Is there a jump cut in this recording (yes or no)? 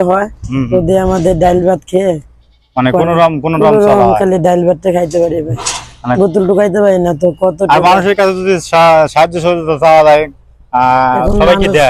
no